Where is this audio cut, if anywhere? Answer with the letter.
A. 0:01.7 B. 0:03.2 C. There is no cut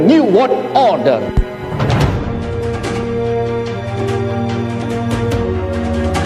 C